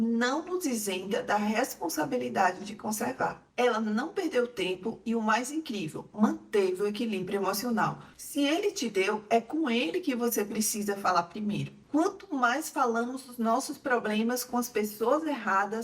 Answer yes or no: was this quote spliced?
yes